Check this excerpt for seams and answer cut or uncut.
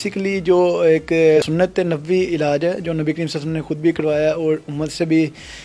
cut